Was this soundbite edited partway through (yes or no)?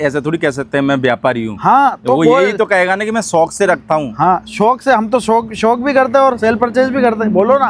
no